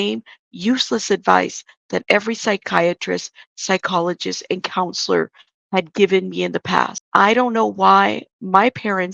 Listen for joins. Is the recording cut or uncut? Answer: cut